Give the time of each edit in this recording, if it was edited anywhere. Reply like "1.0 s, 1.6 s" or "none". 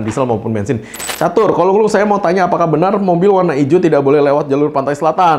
1.0 s